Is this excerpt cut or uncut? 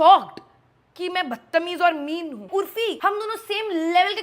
cut